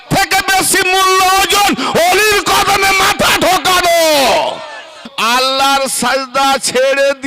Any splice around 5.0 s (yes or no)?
yes